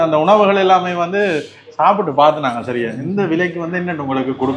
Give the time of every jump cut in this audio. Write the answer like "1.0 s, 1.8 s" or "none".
none